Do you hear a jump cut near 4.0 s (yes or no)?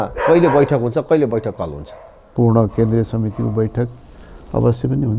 no